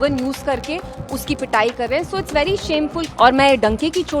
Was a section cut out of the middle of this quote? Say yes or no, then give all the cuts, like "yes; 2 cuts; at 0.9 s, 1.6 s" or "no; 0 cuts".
yes; 1 cut; at 3.0 s